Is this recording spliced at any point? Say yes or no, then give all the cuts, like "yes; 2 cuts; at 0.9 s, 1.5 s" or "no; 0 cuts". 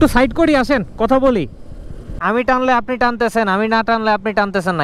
yes; 1 cut; at 2.1 s